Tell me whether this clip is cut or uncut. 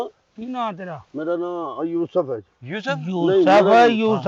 uncut